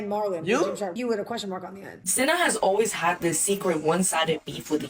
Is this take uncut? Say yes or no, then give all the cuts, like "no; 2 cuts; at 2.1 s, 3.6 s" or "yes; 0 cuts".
no; 2 cuts; at 1.0 s, 2.0 s